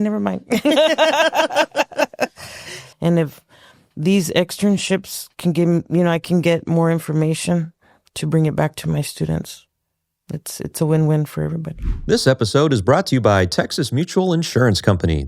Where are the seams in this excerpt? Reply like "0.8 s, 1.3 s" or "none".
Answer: 2.7 s, 11.7 s

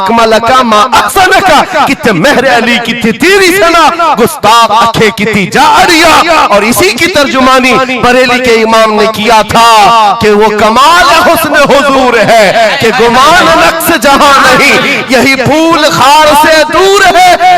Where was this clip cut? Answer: none

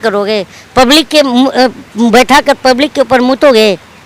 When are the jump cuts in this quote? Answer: none

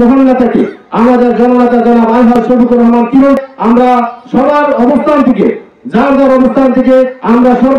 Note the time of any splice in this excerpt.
3.4 s

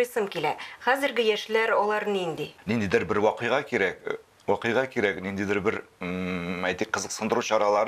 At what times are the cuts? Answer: 2.5 s

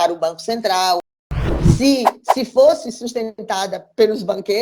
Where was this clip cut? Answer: 1.5 s

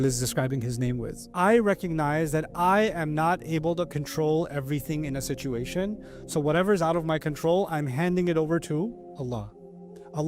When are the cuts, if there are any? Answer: 1.3 s

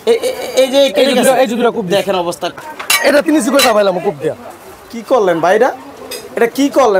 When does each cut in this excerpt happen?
2.6 s

